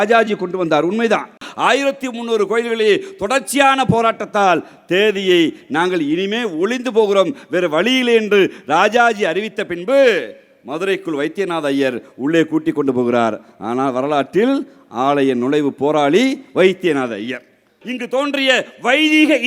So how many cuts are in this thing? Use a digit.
2